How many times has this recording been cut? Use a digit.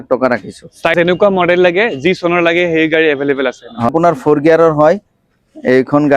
2